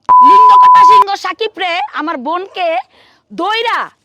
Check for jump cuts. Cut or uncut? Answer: cut